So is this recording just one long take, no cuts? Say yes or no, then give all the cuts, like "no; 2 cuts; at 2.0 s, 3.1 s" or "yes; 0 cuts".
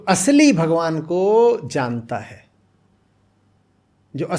yes; 0 cuts